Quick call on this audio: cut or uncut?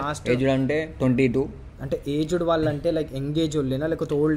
uncut